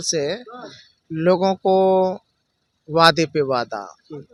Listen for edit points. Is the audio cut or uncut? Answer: uncut